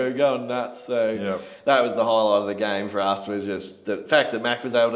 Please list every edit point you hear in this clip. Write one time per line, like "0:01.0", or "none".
none